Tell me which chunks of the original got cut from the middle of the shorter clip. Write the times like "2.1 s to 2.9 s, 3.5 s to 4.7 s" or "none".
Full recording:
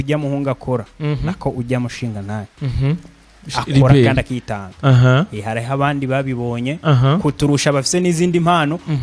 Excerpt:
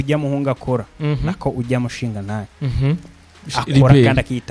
none